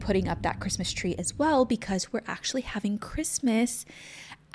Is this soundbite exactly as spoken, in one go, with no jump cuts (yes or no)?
yes